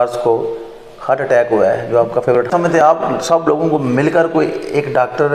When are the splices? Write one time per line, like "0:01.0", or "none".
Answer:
0:02.5